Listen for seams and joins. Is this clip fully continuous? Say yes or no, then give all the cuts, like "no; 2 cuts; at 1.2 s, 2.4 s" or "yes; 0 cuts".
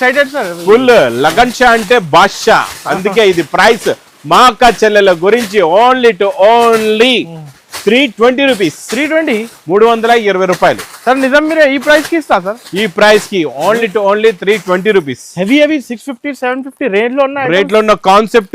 yes; 0 cuts